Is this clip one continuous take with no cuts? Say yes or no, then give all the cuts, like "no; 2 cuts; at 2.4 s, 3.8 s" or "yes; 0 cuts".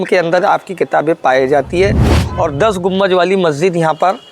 no; 1 cut; at 2.1 s